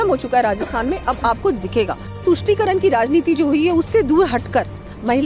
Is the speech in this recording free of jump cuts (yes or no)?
no